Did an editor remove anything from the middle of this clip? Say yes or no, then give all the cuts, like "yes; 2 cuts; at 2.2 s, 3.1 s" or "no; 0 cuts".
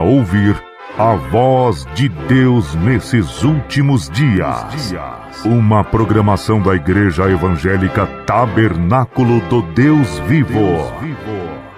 no; 0 cuts